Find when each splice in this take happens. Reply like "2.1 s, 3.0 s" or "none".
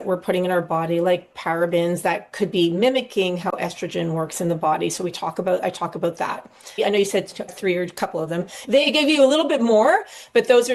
none